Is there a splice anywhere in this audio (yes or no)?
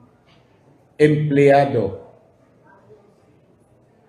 no